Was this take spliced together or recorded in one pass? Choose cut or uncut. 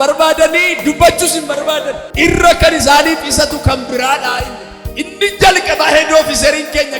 cut